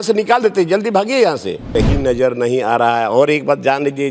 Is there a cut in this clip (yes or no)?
yes